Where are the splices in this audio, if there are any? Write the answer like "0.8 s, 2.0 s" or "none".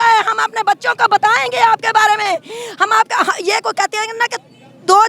none